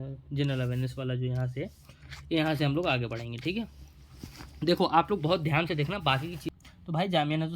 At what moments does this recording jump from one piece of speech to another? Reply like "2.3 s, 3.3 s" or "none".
6.5 s